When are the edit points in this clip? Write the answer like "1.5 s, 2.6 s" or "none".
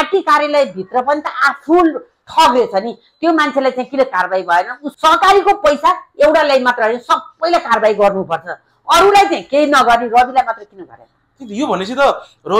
4.8 s